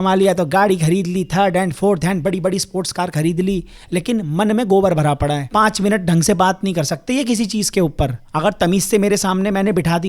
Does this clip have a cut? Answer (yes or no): no